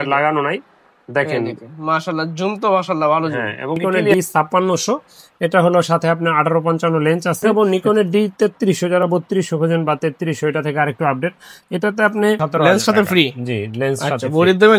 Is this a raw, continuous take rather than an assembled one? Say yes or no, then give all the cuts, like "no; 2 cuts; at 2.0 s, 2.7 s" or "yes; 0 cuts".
no; 3 cuts; at 3.9 s, 7.5 s, 12.4 s